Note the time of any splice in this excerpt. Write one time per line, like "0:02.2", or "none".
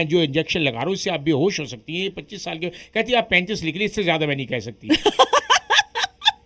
none